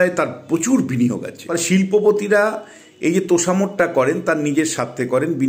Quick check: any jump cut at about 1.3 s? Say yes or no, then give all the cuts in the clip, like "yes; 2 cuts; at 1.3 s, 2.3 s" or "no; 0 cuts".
yes; 1 cut; at 1.3 s